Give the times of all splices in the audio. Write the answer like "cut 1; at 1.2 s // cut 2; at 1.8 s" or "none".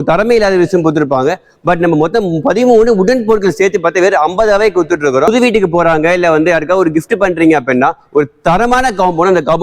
cut 1; at 5.3 s